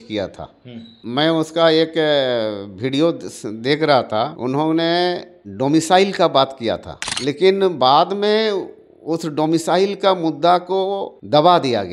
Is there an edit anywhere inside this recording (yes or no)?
yes